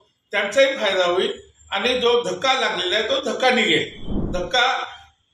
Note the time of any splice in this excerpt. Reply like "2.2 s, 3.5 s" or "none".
4.2 s